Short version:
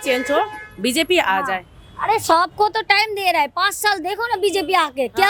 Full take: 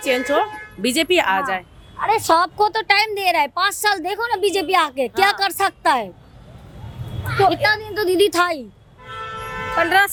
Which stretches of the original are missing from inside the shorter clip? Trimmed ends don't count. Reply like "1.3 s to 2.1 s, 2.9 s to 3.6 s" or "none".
none